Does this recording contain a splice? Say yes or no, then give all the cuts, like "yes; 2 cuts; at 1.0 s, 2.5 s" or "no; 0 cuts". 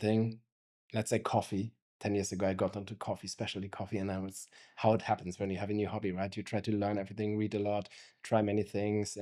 no; 0 cuts